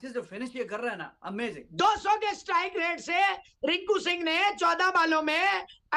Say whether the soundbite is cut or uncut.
cut